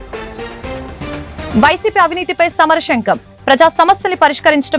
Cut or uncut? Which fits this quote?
cut